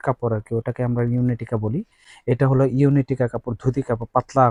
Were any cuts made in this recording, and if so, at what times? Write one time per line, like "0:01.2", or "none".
none